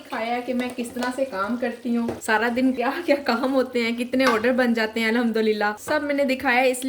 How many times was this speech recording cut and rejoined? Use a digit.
3